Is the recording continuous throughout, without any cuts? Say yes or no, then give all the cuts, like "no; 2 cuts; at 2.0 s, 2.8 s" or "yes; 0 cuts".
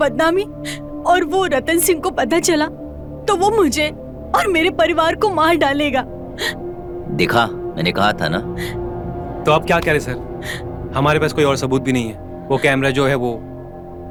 yes; 0 cuts